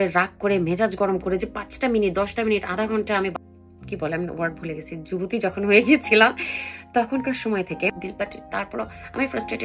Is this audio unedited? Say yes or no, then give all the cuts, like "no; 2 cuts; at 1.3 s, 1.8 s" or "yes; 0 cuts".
no; 2 cuts; at 3.4 s, 8.0 s